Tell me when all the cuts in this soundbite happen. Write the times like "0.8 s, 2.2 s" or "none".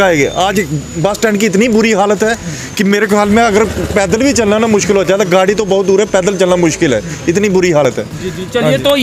none